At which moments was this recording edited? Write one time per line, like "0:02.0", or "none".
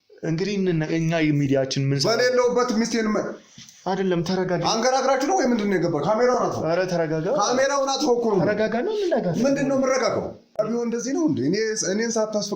0:10.6

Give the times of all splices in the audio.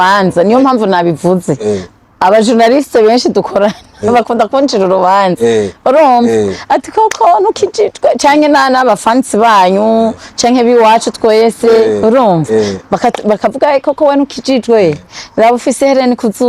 none

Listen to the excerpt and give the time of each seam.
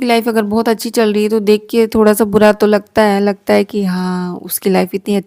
none

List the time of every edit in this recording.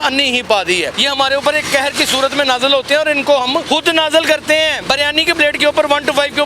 0:00.9
0:03.6
0:04.8

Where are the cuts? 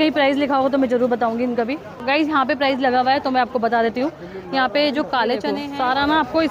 0:05.5

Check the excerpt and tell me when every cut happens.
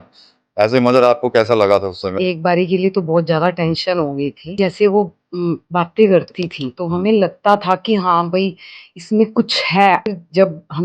0:02.1
0:04.6
0:10.1

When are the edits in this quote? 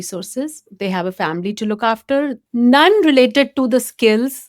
0:02.4

